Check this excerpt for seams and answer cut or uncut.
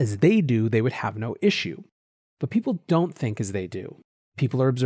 uncut